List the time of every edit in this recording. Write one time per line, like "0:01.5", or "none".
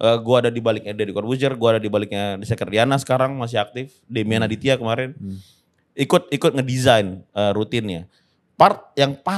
none